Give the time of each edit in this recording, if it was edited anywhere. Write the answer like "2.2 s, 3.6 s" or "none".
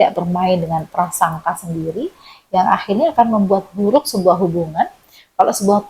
none